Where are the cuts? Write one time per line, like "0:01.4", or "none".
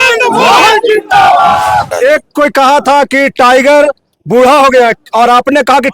0:01.9

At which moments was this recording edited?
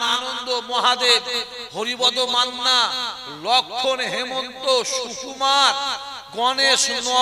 none

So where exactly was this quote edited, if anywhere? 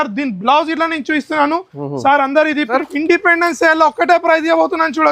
0:02.7

